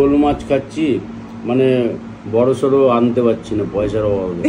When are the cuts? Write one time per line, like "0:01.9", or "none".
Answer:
none